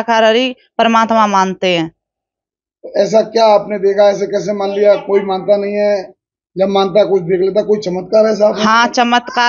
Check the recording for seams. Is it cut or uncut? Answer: uncut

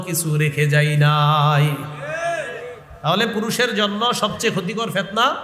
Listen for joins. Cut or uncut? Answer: uncut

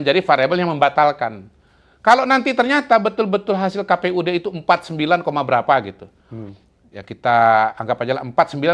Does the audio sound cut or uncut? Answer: uncut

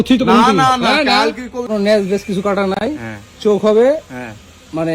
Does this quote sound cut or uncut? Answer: cut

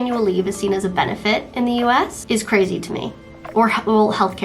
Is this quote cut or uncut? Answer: cut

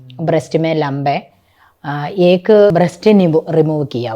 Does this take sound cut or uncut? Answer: cut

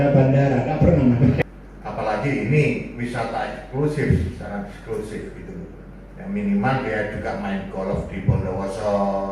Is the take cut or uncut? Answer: cut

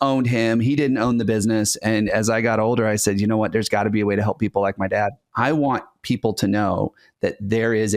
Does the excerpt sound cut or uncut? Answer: cut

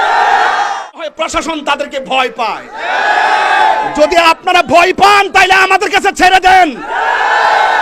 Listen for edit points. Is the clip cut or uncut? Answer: cut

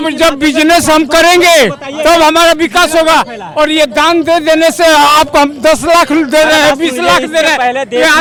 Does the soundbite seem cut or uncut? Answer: uncut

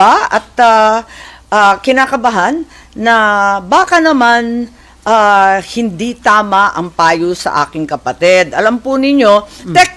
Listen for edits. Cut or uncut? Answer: uncut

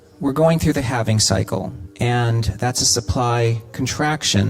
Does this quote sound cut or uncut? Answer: cut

